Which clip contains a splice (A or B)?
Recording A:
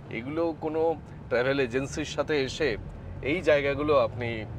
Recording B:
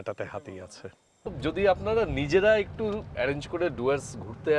B